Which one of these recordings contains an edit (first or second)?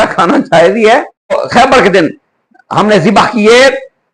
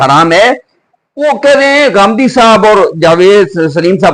first